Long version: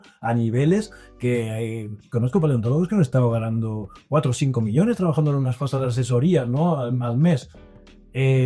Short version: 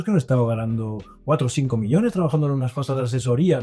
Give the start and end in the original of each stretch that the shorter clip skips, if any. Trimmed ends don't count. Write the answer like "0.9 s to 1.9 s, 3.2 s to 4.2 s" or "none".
none

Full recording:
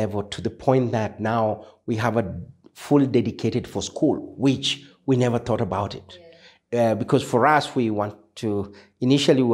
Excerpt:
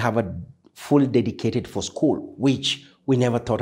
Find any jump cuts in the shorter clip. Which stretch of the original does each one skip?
none

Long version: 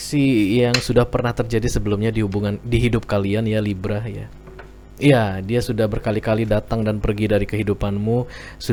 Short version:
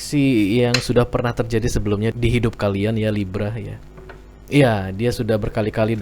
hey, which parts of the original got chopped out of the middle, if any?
2.1 s to 2.6 s

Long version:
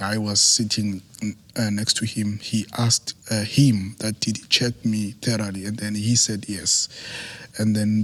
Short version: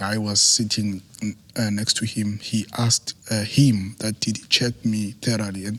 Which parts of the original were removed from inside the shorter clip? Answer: none

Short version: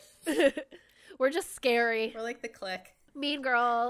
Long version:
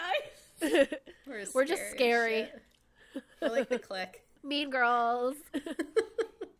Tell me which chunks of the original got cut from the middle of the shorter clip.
3.0 s to 3.9 s

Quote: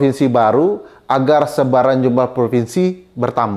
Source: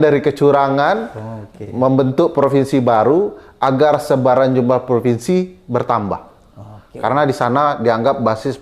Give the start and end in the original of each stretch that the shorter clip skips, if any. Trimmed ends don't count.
none

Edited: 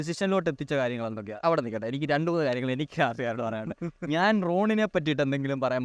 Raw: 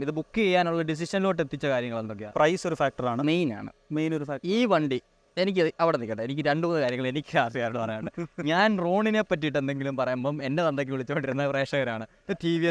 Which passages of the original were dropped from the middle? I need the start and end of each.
2.3 s to 5.7 s

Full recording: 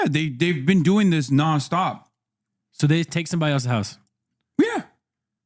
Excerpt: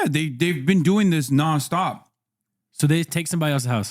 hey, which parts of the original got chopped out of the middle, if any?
none

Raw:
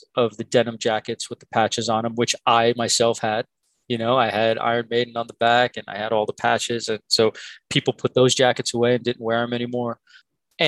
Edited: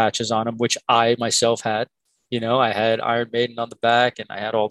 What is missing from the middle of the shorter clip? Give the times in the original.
none

